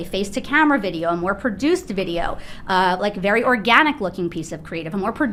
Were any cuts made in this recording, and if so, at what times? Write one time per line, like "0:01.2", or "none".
none